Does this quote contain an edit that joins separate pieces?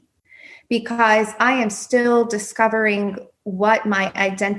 no; 0 cuts

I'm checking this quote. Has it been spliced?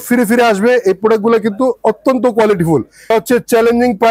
yes; 1 cut; at 3.1 s

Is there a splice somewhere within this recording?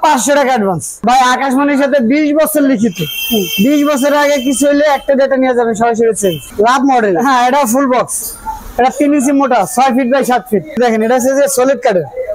yes; 3 cuts; at 1.0 s, 6.4 s, 10.8 s

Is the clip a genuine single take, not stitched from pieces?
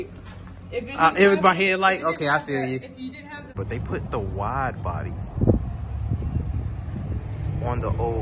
no; 1 cut; at 3.6 s

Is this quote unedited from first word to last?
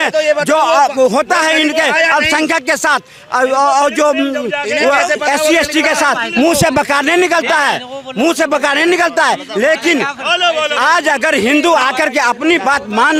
yes; 0 cuts

